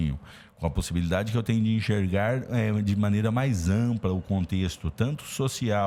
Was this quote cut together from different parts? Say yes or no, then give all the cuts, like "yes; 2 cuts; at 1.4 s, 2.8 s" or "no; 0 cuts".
no; 0 cuts